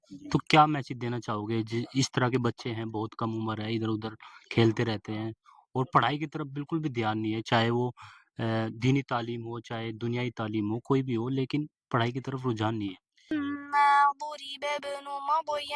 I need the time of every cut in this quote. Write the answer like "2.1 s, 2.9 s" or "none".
13.3 s